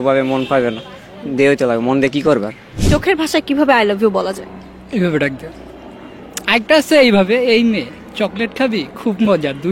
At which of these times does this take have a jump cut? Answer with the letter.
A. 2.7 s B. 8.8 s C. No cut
A